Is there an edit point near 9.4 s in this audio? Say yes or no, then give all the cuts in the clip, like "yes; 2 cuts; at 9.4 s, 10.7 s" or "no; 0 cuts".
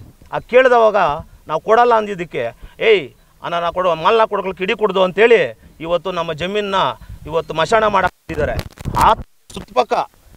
no; 0 cuts